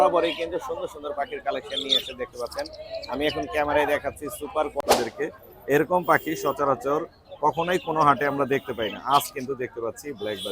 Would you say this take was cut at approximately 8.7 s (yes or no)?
no